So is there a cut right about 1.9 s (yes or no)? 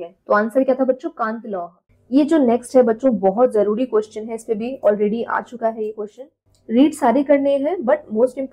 yes